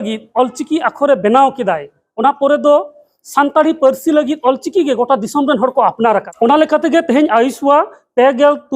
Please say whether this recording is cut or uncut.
cut